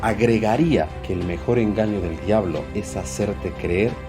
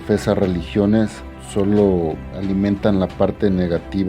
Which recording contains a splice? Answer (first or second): first